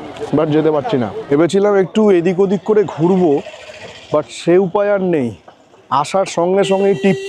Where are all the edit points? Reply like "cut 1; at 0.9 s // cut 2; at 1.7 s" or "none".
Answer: none